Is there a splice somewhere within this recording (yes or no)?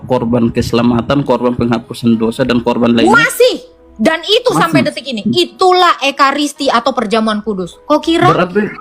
no